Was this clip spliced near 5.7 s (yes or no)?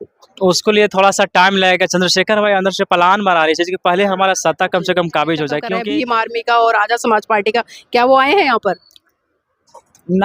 yes